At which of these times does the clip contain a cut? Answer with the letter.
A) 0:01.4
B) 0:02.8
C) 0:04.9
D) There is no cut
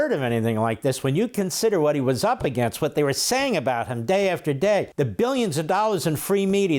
C